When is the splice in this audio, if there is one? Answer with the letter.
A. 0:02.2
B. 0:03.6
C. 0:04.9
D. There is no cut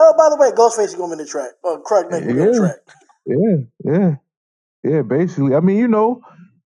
A